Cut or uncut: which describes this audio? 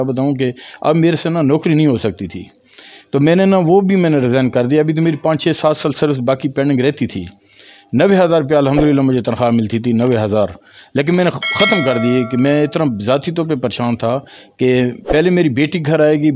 uncut